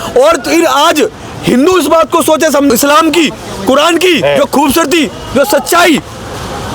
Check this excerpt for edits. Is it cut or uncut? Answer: cut